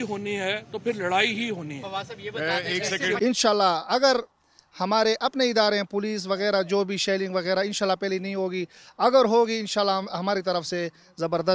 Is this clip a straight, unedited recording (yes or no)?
no